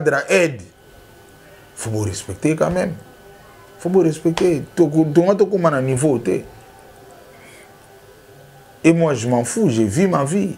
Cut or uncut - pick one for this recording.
uncut